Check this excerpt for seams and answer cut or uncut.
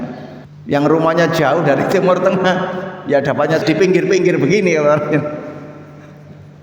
cut